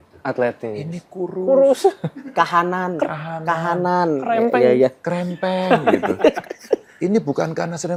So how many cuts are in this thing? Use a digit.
0